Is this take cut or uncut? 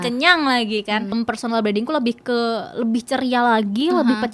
cut